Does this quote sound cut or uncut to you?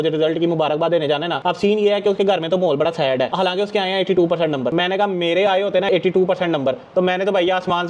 uncut